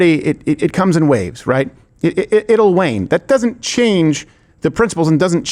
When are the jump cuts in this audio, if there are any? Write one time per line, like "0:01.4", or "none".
none